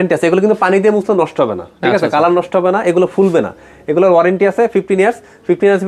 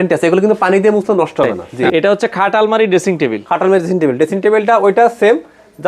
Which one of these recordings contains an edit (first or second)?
second